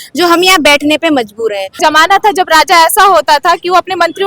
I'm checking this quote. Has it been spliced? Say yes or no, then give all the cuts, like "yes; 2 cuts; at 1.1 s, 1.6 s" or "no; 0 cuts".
yes; 1 cut; at 1.7 s